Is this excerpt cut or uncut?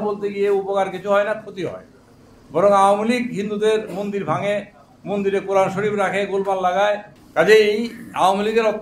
cut